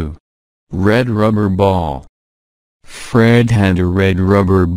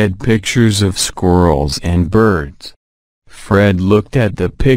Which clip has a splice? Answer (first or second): second